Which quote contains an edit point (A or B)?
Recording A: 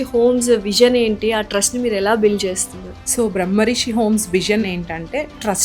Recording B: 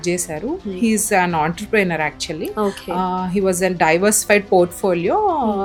A